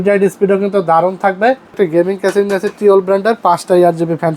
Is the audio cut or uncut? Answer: cut